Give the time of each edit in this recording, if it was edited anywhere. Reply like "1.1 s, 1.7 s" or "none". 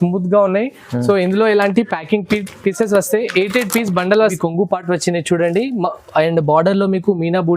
4.3 s